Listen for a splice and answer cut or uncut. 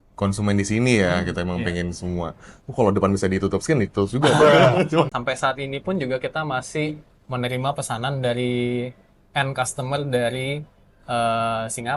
cut